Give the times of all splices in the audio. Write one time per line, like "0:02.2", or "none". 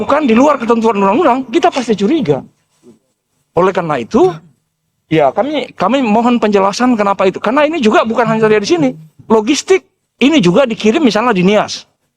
none

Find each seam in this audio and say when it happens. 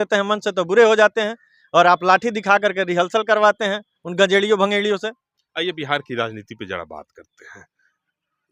none

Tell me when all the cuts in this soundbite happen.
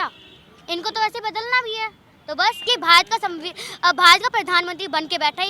0:02.7

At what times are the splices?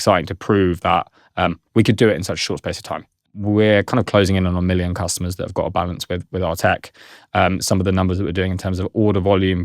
0:03.3

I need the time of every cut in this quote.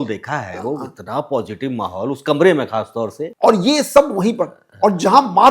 0:03.2

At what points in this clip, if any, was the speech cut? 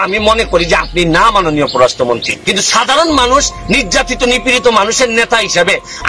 0:02.4

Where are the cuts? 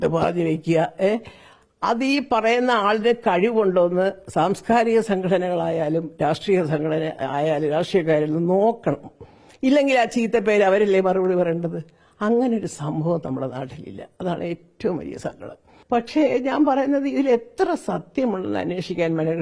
0:15.7

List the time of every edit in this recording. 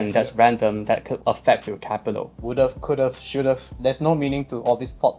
0:01.1
0:02.3
0:03.7

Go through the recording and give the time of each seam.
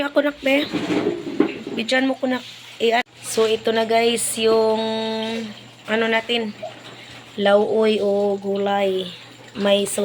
0:03.1

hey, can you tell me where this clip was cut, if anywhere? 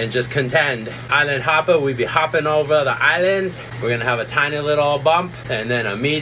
0:01.1
0:03.7
0:05.4

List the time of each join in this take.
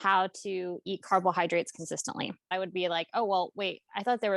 0:02.4

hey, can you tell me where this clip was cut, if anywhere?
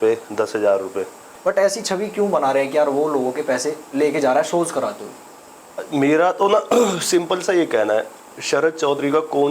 0:01.3

